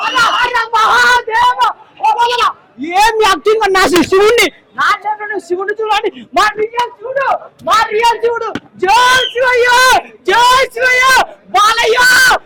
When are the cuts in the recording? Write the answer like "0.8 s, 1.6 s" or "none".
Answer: none